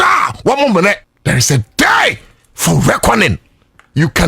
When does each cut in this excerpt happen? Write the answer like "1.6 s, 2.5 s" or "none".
1.1 s